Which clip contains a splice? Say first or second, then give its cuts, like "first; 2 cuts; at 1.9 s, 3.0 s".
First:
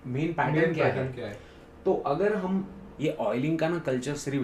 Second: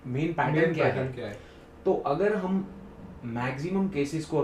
first; 1 cut; at 2.8 s